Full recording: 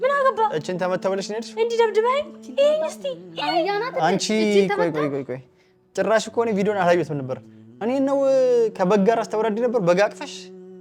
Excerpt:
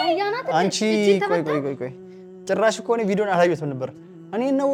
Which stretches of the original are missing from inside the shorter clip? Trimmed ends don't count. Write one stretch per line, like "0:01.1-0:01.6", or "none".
none